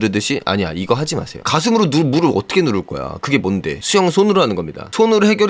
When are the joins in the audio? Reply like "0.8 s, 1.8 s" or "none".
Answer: 1.3 s, 3.8 s